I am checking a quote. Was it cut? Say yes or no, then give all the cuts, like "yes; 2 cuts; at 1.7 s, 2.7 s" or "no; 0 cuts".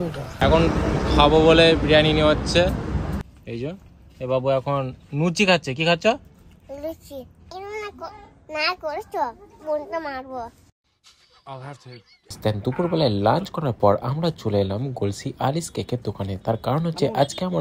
yes; 3 cuts; at 3.2 s, 7.5 s, 12.4 s